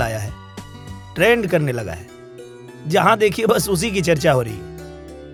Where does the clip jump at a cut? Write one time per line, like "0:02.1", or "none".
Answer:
none